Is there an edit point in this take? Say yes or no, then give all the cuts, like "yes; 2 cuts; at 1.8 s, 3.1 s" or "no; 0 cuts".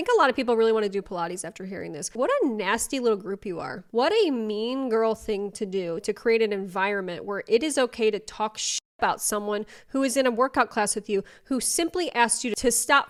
no; 0 cuts